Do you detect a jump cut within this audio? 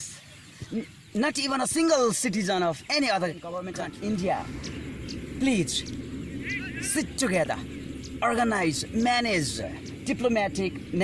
yes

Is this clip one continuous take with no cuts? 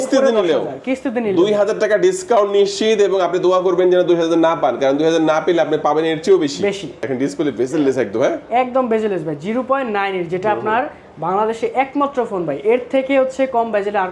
no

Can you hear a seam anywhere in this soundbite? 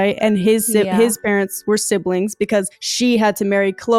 no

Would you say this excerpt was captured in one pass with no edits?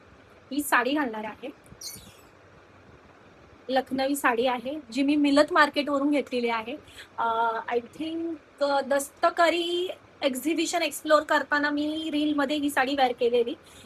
yes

